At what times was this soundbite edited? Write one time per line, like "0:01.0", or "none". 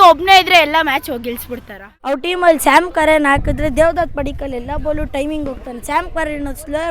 0:02.2

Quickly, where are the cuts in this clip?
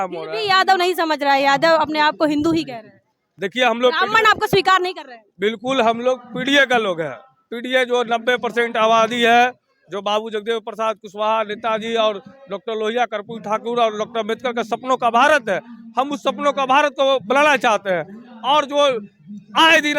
none

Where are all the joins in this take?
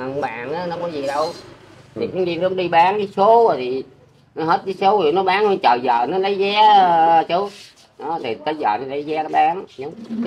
none

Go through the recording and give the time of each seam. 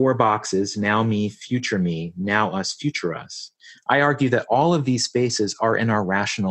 none

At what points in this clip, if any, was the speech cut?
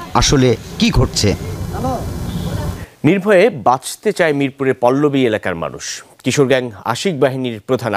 0:02.8

